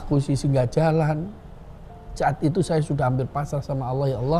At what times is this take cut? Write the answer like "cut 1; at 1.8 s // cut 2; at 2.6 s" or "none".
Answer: none

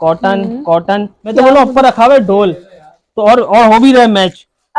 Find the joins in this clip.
cut 1; at 1.2 s

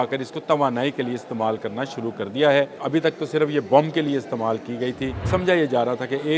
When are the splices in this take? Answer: cut 1; at 2.8 s // cut 2; at 5.2 s

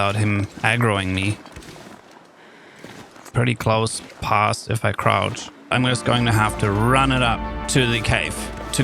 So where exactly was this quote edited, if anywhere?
cut 1; at 3.2 s // cut 2; at 5.7 s // cut 3; at 7.6 s

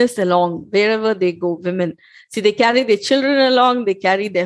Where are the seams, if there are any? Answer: none

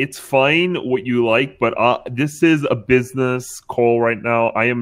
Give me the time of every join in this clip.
none

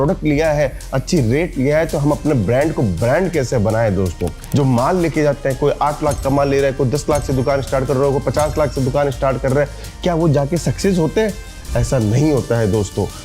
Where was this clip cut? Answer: cut 1; at 4.3 s

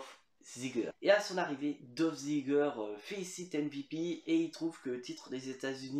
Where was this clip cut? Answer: cut 1; at 0.9 s

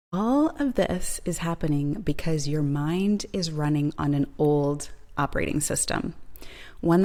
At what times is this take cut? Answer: none

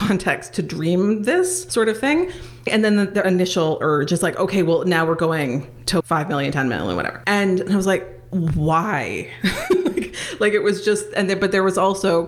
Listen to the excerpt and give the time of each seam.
cut 1; at 1.6 s // cut 2; at 2.7 s // cut 3; at 6.0 s // cut 4; at 7.2 s // cut 5; at 8.2 s

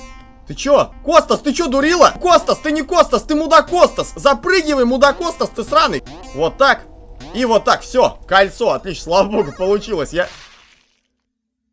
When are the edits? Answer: cut 1; at 1.0 s // cut 2; at 2.2 s // cut 3; at 6.0 s

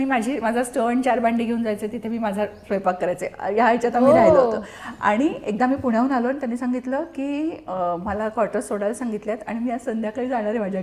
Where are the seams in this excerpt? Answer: none

